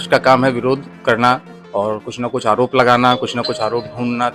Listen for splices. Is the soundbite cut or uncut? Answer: cut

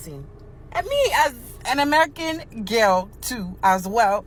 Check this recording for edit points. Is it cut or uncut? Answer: uncut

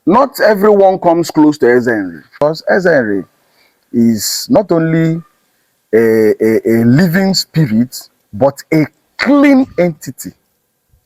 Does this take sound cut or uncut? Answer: cut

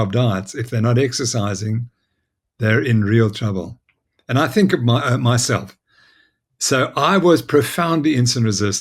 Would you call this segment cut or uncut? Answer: uncut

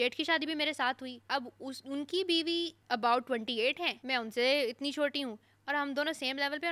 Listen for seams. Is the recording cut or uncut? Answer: cut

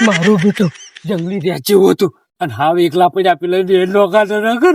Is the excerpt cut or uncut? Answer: uncut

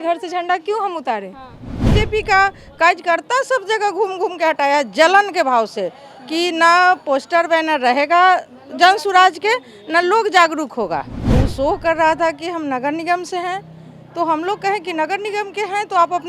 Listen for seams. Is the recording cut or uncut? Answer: cut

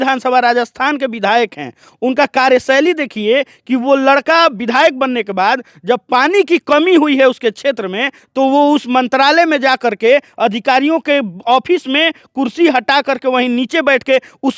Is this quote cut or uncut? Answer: uncut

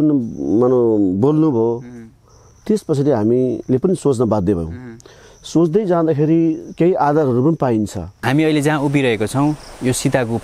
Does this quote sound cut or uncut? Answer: cut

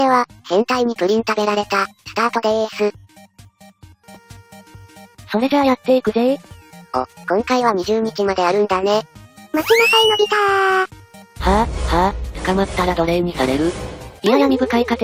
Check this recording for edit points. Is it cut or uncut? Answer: uncut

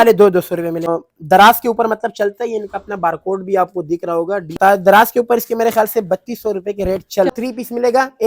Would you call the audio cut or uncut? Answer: cut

